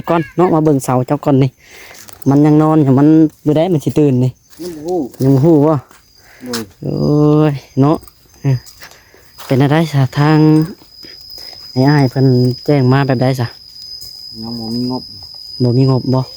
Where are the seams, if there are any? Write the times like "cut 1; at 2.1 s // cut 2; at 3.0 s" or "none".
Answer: none